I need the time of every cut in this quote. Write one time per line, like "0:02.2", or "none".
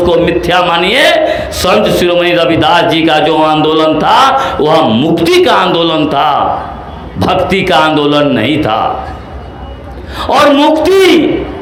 none